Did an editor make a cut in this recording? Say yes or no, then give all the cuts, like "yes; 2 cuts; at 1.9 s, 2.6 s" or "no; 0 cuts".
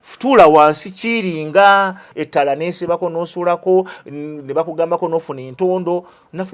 yes; 1 cut; at 2.0 s